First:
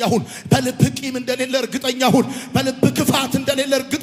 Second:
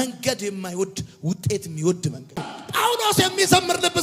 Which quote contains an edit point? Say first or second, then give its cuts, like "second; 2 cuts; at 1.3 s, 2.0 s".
second; 1 cut; at 2.5 s